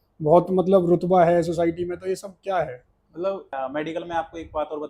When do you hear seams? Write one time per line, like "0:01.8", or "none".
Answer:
0:03.5